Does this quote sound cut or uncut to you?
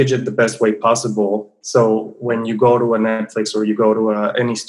uncut